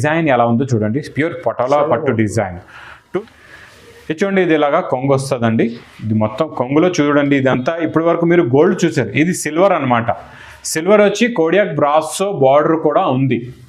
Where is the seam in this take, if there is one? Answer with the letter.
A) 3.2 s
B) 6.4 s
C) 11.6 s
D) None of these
A